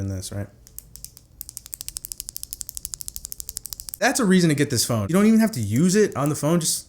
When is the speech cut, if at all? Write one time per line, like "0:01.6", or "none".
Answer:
0:04.0
0:05.0